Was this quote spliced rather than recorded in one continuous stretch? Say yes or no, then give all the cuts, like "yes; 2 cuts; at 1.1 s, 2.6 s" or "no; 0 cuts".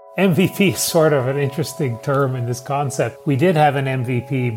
yes; 1 cut; at 3.2 s